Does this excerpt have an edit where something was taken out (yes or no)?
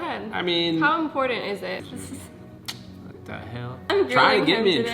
yes